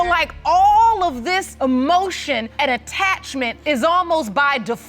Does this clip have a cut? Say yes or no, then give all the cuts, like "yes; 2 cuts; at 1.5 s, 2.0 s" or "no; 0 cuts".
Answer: yes; 3 cuts; at 1.5 s, 2.5 s, 3.6 s